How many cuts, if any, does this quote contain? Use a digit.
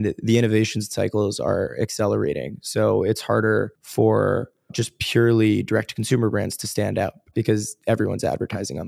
3